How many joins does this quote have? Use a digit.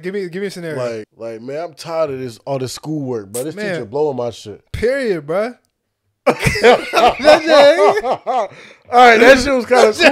1